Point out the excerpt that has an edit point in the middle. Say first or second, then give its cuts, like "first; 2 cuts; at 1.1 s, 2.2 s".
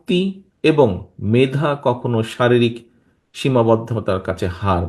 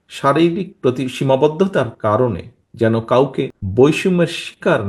second; 1 cut; at 3.6 s